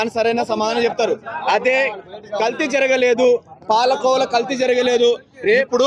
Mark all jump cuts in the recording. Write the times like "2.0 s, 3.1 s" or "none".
none